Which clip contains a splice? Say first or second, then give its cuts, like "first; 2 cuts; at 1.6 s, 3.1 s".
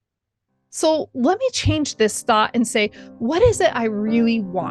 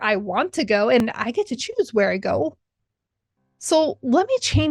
second; 1 cut; at 1.0 s